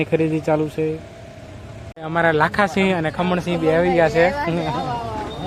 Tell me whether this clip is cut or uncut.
cut